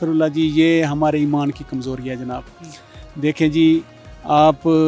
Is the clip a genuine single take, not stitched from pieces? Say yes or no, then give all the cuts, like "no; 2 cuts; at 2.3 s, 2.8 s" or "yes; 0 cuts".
yes; 0 cuts